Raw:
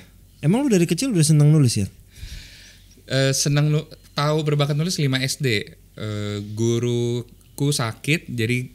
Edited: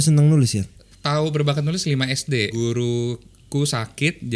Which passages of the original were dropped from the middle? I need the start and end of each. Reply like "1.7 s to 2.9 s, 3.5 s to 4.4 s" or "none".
2.1 s to 4.0 s, 5.6 s to 6.6 s